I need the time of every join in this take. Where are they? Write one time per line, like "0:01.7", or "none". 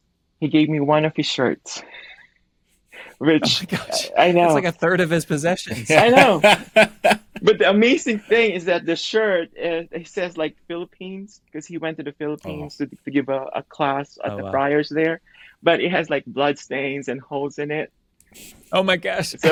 none